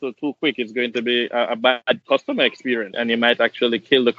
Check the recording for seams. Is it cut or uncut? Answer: cut